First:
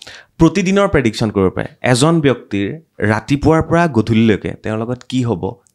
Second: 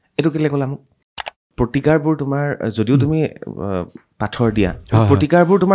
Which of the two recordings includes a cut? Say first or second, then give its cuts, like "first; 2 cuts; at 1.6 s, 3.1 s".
second; 1 cut; at 1.4 s